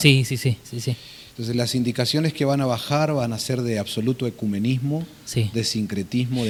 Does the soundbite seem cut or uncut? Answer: uncut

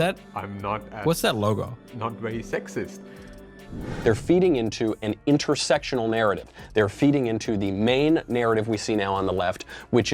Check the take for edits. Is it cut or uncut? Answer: cut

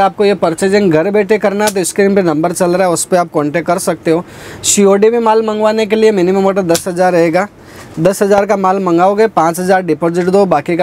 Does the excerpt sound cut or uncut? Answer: uncut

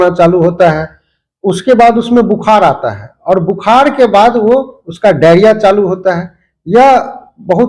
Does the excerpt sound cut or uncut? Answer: uncut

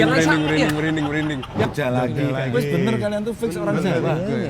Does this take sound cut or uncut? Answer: cut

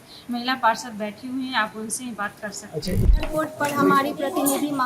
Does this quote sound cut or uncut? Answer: cut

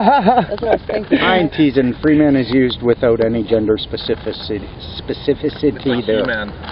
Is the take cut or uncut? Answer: cut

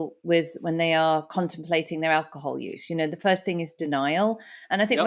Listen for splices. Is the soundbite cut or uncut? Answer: uncut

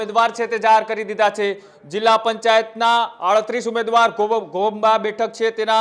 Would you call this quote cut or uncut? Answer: uncut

